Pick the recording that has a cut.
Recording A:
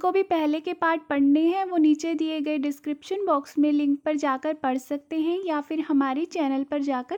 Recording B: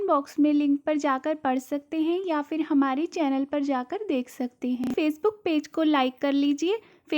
B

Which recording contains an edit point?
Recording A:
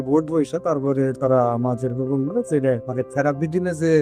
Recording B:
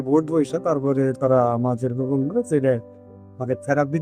A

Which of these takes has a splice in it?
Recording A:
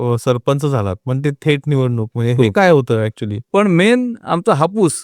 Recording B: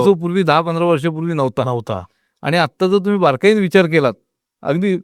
A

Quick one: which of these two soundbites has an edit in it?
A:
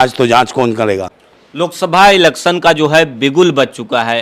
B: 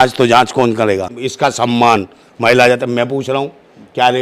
B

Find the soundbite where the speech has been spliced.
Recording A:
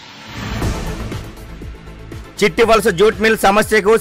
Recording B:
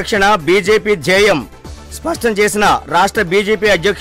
A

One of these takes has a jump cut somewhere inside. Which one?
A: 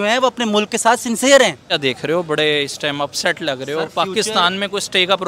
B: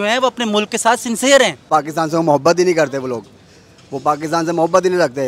B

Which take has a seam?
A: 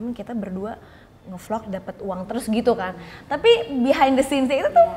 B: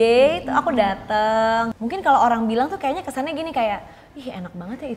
B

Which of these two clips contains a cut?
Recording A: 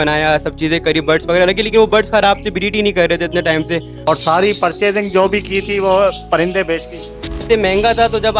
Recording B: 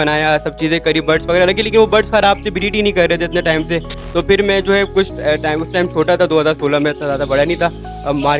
A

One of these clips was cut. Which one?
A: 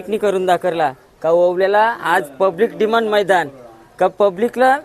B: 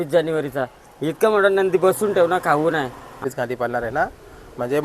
B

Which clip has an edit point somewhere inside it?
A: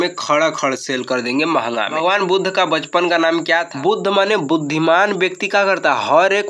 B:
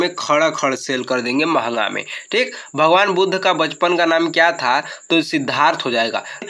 A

